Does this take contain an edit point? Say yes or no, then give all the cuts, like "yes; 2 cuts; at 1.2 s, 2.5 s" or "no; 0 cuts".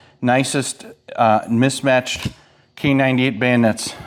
no; 0 cuts